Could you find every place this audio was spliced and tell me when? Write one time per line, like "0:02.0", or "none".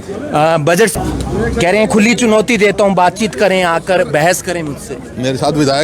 0:00.9